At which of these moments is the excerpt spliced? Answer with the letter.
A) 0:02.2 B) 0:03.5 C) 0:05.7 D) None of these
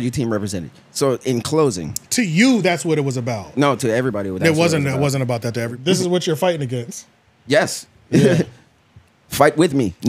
C